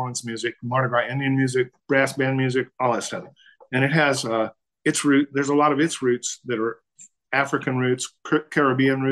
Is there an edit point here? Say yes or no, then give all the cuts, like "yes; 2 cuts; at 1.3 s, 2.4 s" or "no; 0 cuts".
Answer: yes; 2 cuts; at 1.8 s, 8.1 s